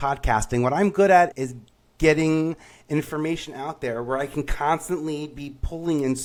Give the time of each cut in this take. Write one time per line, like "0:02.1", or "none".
none